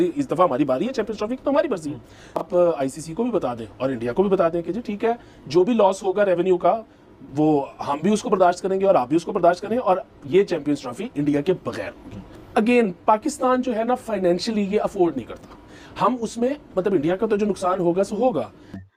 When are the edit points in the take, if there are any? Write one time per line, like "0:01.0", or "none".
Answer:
none